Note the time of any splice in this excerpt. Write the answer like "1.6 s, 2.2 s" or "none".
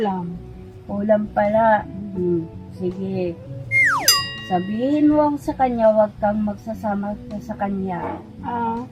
none